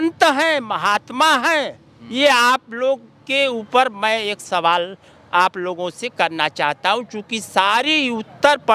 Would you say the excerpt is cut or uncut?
uncut